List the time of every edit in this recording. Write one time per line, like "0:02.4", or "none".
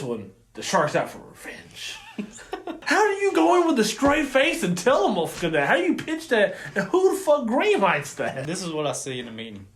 0:02.8
0:08.4